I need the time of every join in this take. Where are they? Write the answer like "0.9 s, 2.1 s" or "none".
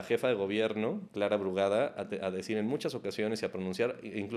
1.0 s